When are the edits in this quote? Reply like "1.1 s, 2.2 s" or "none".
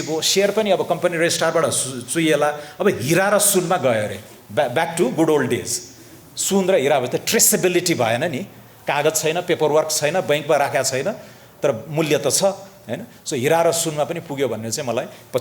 none